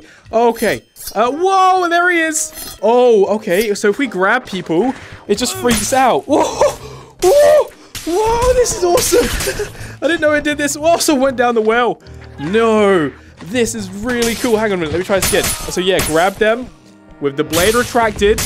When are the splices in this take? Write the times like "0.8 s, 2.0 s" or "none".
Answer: none